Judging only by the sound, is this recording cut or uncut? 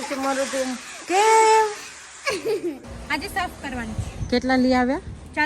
cut